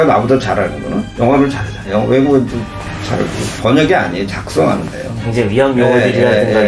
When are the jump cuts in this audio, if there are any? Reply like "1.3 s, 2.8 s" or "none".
1.9 s, 3.5 s, 5.3 s